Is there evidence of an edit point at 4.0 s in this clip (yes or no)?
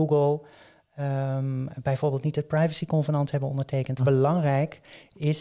yes